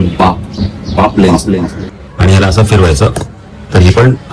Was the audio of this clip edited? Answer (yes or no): yes